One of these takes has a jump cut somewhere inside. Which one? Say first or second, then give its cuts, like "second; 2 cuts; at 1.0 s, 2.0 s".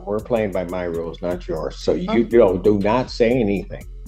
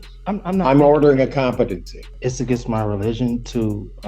second; 1 cut; at 2.2 s